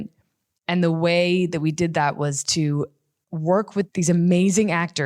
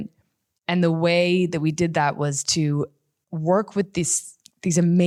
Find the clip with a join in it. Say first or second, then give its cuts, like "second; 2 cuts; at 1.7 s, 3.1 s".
first; 1 cut; at 3.9 s